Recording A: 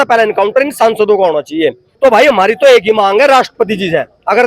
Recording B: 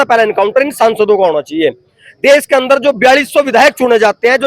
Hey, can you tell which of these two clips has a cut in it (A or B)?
A